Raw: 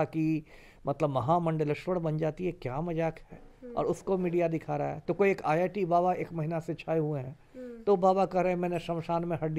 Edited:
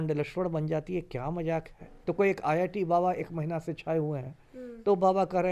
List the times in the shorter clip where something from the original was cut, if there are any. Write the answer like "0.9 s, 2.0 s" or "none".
2.0 s